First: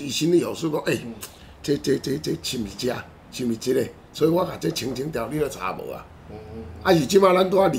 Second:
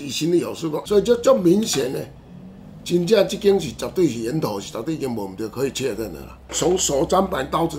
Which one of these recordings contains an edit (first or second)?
second